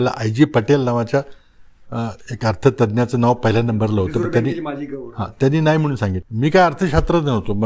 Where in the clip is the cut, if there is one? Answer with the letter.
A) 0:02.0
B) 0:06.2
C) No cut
B